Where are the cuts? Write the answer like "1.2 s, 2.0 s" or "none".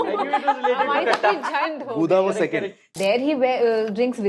2.9 s